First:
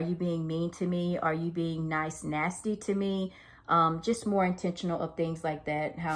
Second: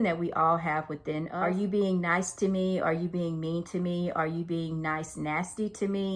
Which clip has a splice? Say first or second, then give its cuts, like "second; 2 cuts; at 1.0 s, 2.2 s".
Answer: second; 1 cut; at 1.3 s